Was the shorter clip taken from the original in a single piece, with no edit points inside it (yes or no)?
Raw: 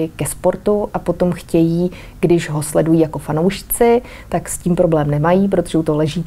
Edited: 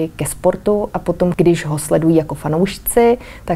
no